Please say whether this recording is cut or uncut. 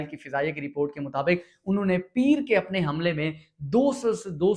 uncut